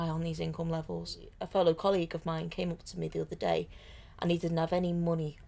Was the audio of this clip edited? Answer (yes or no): yes